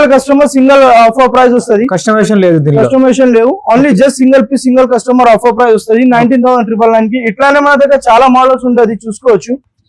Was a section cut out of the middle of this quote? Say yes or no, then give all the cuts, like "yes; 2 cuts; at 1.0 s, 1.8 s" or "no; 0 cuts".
no; 0 cuts